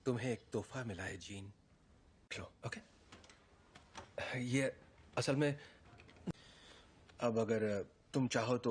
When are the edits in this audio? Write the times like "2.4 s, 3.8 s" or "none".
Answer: none

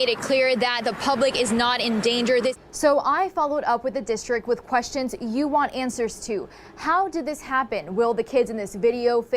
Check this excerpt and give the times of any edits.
2.6 s

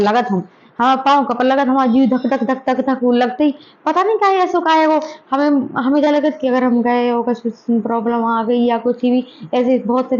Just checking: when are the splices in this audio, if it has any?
none

